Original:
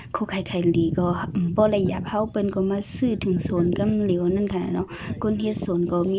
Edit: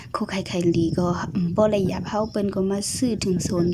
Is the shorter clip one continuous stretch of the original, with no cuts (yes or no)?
yes